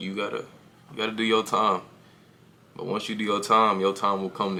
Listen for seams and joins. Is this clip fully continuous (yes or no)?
yes